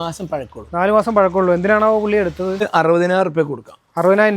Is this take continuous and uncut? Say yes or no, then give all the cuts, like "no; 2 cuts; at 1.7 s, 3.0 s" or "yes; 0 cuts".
no; 1 cut; at 2.7 s